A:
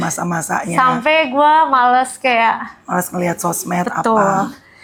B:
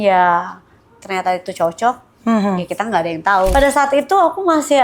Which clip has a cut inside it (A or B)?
B